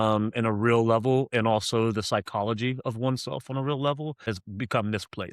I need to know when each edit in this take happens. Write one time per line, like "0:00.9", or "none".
0:04.3